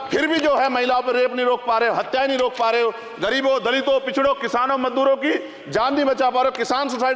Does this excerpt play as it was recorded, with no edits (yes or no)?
yes